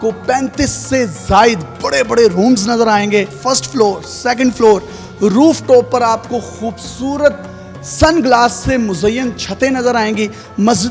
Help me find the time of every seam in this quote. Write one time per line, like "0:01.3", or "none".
none

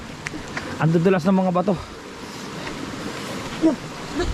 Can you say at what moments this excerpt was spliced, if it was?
none

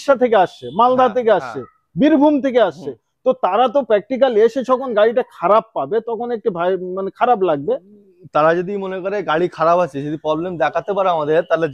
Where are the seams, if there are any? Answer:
none

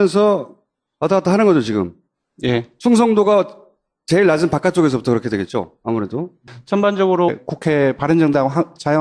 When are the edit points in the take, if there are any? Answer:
none

